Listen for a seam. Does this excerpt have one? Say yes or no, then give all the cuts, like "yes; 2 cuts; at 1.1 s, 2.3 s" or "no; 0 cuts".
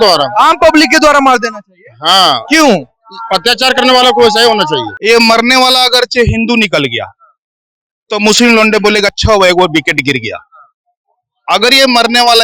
yes; 1 cut; at 4.9 s